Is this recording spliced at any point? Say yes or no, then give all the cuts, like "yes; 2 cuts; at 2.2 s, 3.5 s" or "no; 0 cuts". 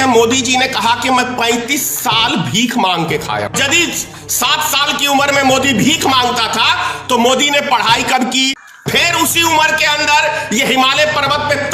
yes; 2 cuts; at 3.5 s, 8.7 s